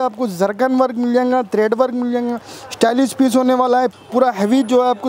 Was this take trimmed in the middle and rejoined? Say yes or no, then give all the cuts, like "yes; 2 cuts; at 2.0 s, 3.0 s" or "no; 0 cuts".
yes; 1 cut; at 3.9 s